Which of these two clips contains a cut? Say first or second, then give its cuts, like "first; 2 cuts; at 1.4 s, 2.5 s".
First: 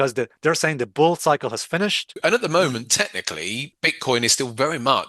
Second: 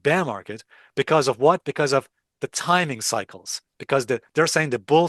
first; 2 cuts; at 2.1 s, 3.7 s